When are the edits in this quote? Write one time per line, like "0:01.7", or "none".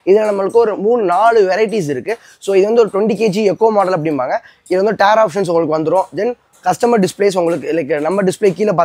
none

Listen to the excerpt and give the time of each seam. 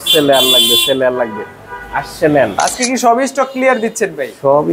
0:02.6

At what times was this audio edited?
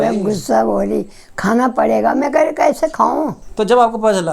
0:03.4

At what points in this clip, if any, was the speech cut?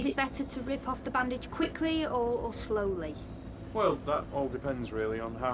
none

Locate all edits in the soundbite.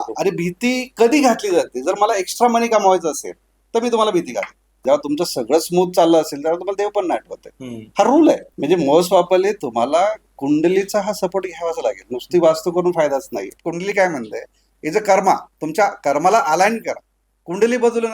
0:04.8
0:08.5
0:13.5

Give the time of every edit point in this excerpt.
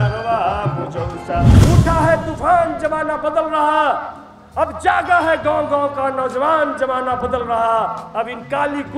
0:01.6

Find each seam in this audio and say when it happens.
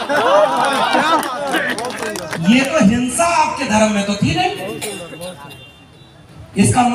none

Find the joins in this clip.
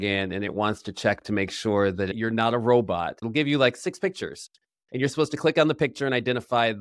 0:02.1
0:03.2
0:04.7

